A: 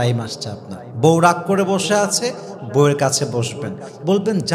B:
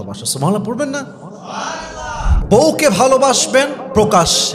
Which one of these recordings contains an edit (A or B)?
B